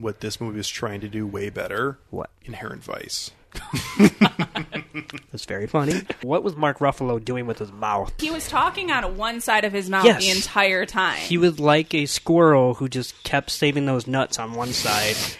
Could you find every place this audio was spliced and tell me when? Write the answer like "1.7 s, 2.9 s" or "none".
5.9 s, 8.2 s